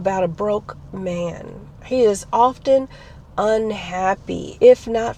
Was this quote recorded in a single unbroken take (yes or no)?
yes